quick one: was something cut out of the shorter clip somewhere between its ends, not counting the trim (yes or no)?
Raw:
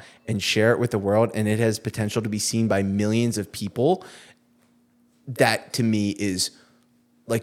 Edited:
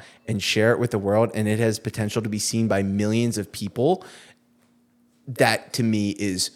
no